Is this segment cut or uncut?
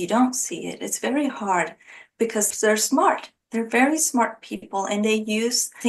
cut